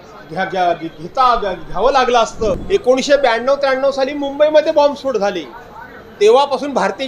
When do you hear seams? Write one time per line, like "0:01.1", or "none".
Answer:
0:02.6